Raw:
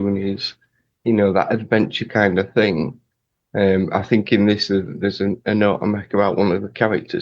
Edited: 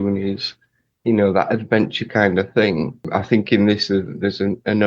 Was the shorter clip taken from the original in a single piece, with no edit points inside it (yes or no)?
no